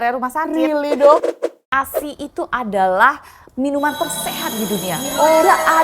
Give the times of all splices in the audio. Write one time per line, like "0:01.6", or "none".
0:01.3